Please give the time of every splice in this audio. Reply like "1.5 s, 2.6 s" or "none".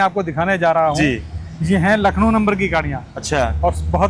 none